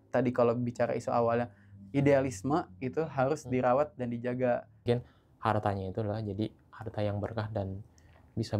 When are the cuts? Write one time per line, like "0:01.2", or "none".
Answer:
0:04.8